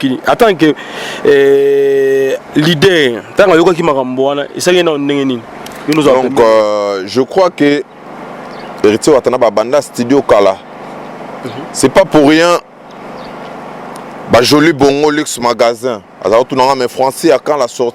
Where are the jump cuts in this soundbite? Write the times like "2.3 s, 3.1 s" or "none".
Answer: none